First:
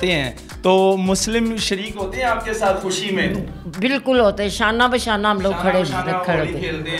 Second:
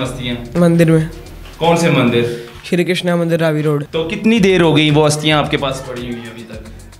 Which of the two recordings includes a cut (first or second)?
second